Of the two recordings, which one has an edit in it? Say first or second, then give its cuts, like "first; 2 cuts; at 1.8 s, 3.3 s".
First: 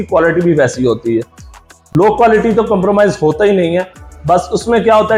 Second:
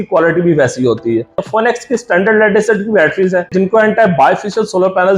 second; 2 cuts; at 1.4 s, 3.5 s